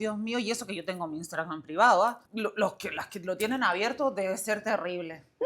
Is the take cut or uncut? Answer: cut